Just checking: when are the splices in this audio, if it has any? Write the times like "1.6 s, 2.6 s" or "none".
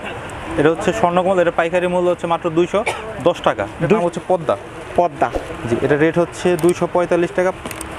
4.0 s

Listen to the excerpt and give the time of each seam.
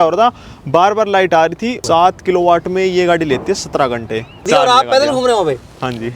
1.8 s, 4.5 s

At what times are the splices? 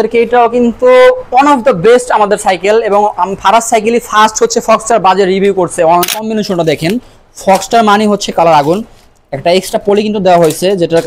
6.1 s

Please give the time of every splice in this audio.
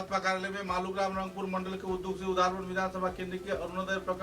none

